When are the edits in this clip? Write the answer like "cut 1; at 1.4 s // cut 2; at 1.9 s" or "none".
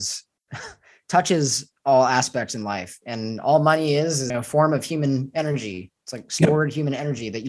cut 1; at 4.3 s